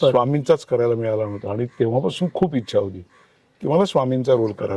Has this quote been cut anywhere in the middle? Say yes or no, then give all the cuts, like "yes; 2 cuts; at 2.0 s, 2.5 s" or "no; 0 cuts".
no; 0 cuts